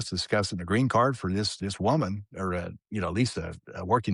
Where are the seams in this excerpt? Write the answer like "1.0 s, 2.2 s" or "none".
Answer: none